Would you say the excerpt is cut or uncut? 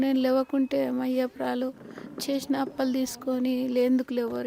uncut